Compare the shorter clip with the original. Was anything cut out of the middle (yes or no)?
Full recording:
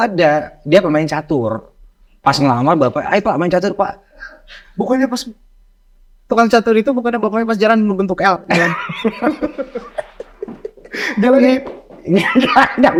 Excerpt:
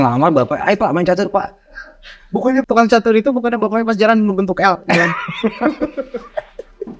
yes